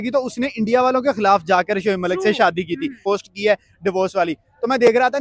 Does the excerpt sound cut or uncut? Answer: cut